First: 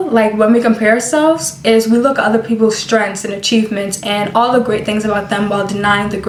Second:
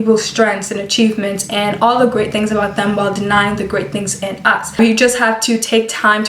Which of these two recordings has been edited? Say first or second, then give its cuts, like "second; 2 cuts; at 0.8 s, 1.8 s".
second; 1 cut; at 4.8 s